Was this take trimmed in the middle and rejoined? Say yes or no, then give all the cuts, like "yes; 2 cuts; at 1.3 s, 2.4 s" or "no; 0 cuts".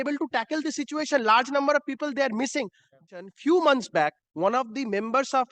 yes; 1 cut; at 3.3 s